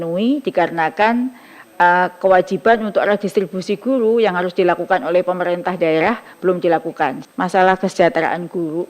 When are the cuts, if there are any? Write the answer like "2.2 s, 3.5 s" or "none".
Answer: 7.2 s